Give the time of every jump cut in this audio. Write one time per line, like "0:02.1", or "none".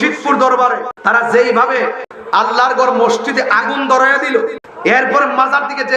0:00.9
0:02.1
0:04.7